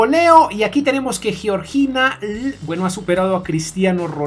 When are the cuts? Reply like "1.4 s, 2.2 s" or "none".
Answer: none